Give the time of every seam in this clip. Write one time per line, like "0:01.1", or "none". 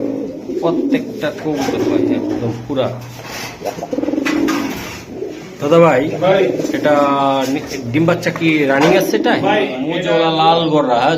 0:09.9